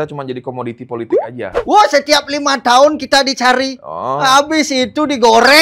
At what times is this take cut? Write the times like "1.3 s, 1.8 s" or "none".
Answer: none